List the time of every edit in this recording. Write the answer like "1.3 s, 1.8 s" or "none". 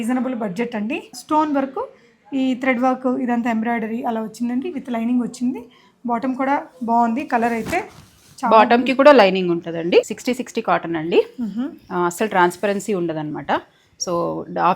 1.1 s, 10.1 s